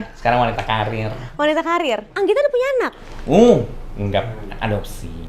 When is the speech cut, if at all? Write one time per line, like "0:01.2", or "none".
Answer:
0:02.1